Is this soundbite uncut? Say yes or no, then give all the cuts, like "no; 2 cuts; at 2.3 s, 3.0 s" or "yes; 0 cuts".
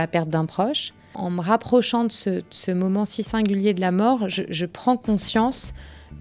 no; 1 cut; at 1.2 s